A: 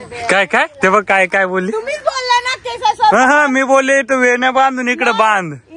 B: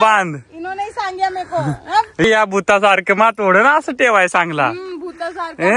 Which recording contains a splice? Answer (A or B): B